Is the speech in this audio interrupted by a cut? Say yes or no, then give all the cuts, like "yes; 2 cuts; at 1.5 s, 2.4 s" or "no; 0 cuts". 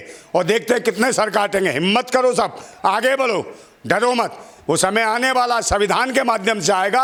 no; 0 cuts